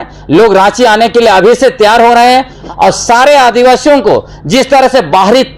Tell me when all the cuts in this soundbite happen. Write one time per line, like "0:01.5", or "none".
0:02.6